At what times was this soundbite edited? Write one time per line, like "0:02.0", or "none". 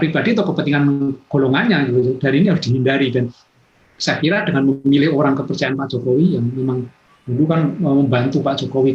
none